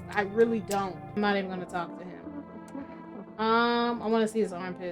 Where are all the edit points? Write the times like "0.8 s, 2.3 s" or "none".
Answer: 1.0 s